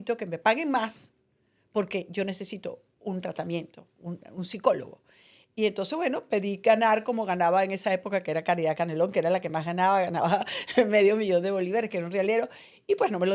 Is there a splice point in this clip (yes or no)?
no